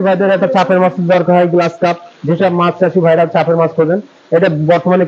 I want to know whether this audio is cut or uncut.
uncut